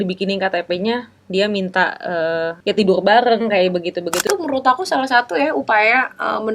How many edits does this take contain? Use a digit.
2